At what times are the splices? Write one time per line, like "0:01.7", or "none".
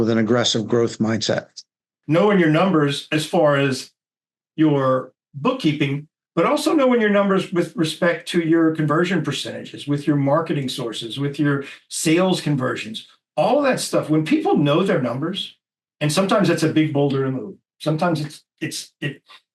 0:02.0